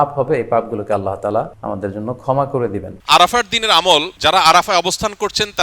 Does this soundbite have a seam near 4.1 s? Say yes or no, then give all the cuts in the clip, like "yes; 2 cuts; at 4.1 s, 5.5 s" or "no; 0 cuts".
yes; 3 cuts; at 1.6 s, 2.9 s, 4.1 s